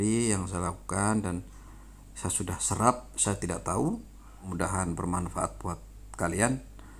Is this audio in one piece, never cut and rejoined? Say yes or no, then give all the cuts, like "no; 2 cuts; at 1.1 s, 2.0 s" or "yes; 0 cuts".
no; 1 cut; at 4.4 s